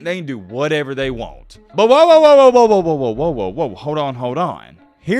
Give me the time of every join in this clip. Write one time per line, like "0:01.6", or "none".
0:01.6